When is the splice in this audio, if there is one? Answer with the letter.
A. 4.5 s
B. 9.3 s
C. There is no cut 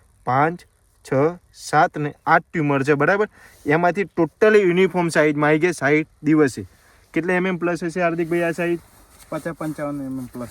C